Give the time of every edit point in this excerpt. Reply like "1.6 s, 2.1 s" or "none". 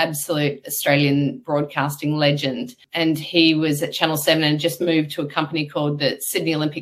2.8 s